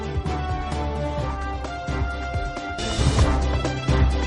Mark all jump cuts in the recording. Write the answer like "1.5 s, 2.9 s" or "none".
2.8 s